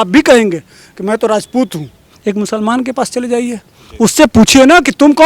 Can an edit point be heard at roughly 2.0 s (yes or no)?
yes